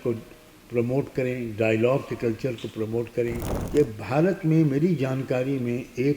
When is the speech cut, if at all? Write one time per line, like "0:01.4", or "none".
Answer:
0:03.5